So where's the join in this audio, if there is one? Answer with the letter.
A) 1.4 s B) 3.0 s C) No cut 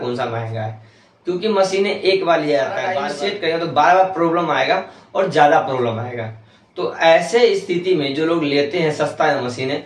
B